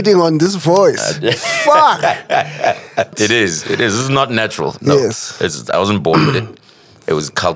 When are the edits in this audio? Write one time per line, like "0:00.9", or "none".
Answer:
0:03.2